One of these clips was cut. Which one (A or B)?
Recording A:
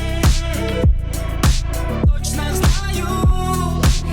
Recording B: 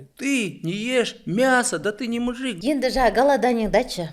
B